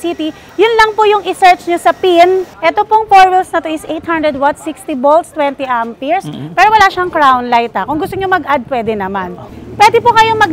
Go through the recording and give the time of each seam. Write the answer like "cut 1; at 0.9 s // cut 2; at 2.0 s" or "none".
cut 1; at 2.5 s // cut 2; at 9.6 s